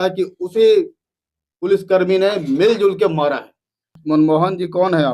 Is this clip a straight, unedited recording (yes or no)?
no